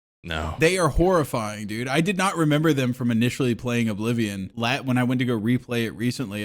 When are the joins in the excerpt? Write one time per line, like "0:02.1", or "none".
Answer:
0:04.5